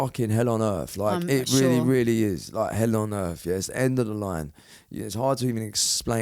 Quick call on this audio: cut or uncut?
uncut